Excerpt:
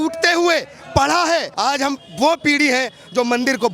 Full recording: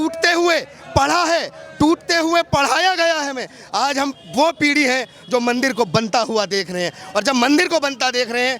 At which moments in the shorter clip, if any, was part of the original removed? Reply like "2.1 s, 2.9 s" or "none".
1.5 s

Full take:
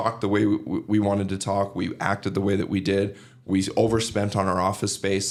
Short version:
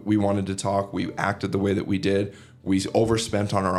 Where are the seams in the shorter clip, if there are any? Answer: none

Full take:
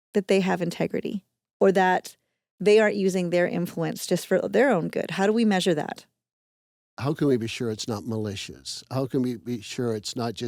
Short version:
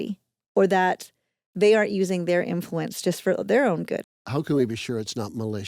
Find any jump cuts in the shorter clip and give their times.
4.0 s

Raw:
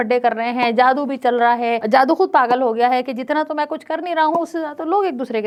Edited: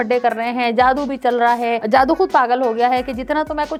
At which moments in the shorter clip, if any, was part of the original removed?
none

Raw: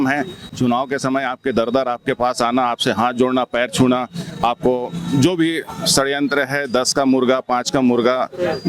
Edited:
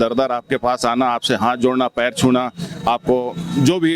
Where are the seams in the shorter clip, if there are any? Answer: none

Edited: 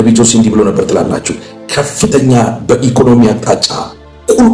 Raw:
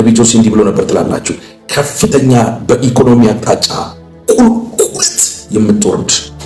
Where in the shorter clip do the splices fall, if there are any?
none

